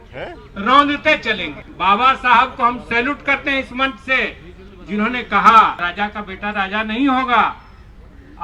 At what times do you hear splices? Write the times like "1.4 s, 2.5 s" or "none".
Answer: 1.6 s, 5.8 s